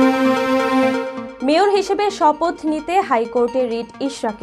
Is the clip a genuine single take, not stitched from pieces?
yes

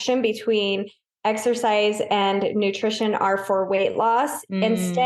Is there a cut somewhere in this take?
no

